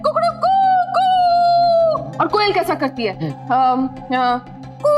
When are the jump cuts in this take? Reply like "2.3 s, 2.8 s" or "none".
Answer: 2.1 s